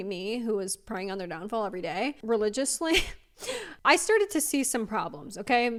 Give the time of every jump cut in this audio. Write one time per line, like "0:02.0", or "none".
none